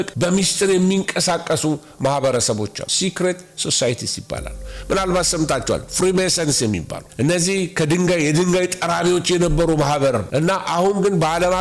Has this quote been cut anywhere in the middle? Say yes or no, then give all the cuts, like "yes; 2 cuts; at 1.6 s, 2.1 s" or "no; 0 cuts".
no; 0 cuts